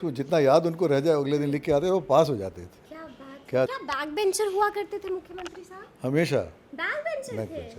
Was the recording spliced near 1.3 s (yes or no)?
no